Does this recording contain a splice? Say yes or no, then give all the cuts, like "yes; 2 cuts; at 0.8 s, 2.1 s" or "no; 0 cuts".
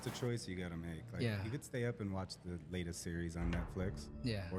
no; 0 cuts